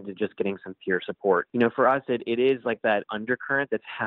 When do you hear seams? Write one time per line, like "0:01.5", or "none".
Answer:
0:01.5
0:03.1